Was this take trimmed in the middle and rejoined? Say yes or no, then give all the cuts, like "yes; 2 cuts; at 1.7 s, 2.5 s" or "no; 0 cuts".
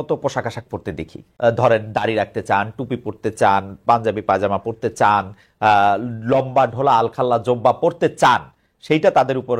yes; 1 cut; at 1.2 s